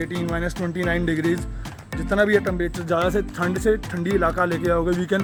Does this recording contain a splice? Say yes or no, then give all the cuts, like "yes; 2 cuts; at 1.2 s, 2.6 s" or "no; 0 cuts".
no; 0 cuts